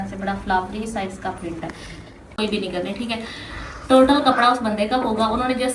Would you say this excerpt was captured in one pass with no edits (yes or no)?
no